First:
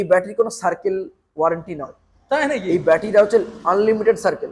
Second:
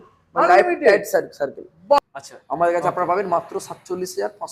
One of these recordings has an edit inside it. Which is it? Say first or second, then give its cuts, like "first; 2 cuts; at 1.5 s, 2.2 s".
second; 1 cut; at 2.0 s